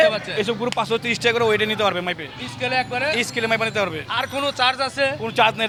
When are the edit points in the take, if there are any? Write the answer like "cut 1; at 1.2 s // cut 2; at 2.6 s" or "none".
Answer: none

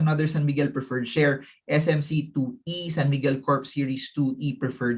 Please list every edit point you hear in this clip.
none

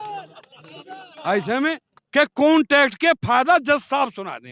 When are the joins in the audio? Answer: none

